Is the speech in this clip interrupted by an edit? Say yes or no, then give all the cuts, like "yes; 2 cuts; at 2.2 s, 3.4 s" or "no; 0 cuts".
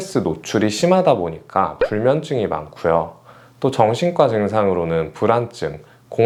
no; 0 cuts